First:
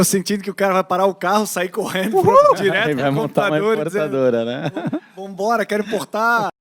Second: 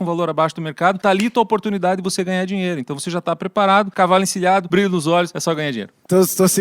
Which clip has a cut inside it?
second; 4 cuts; at 1.0 s, 3.9 s, 4.7 s, 5.4 s

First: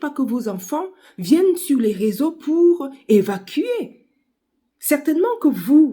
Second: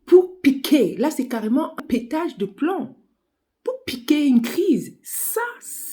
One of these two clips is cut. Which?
second; 1 cut; at 1.7 s

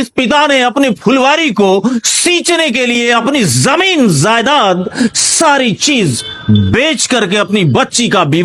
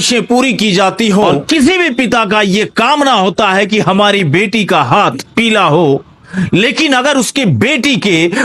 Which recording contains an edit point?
second; 1 cut; at 1.4 s

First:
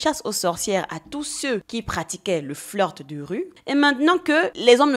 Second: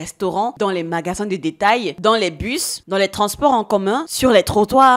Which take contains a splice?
first; 1 cut; at 3.5 s

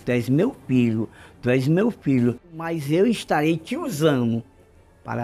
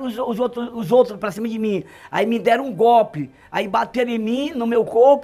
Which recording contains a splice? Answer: first; 1 cut; at 2.6 s

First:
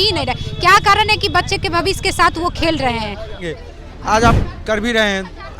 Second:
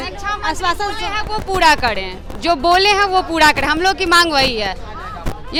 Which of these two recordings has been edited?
first; 1 cut; at 3.5 s

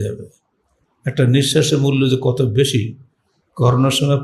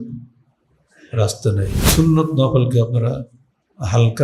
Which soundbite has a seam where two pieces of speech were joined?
second; 1 cut; at 1.9 s

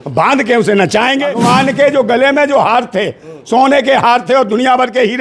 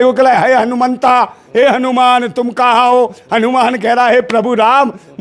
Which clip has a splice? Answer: first; 1 cut; at 1.3 s

